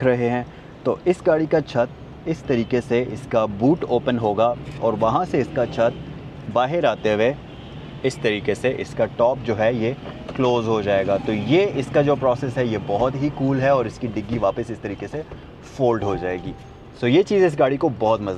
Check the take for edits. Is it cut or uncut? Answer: uncut